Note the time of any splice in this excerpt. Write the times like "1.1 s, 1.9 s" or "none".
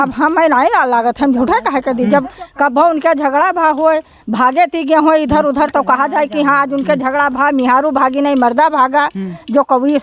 none